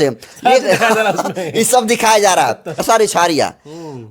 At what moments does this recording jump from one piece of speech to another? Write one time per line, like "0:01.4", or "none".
0:02.8